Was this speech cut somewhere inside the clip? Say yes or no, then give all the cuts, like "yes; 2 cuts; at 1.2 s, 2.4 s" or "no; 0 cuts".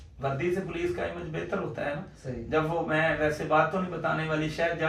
no; 0 cuts